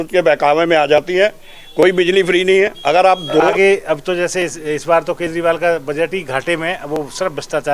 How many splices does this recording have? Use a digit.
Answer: 1